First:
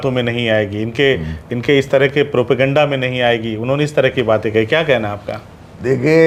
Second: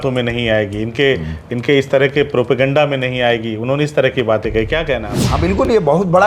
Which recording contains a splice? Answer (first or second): second